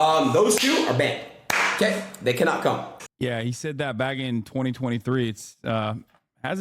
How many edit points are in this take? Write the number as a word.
one